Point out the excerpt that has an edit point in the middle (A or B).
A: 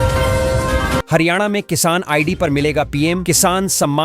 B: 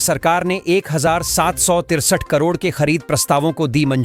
A